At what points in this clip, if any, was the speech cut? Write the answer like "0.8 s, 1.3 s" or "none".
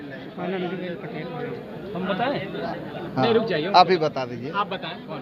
none